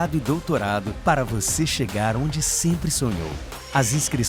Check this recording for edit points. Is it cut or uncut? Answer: uncut